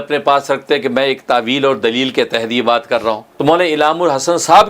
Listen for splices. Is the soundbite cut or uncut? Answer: cut